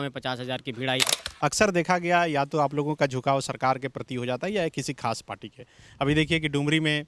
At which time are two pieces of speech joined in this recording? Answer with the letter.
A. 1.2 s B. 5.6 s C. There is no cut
A